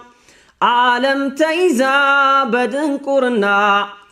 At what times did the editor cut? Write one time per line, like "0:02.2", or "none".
none